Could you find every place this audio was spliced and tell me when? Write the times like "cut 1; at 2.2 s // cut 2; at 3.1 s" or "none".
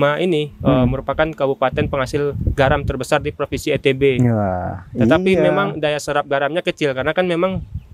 none